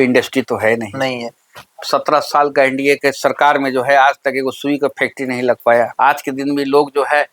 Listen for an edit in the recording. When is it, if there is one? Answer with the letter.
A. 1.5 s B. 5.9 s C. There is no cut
B